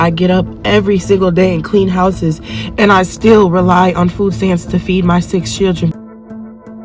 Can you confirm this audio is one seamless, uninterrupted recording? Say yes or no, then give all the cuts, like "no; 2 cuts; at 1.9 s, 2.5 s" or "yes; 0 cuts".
no; 1 cut; at 5.9 s